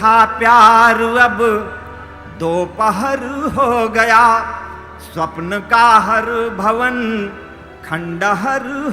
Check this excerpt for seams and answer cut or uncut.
uncut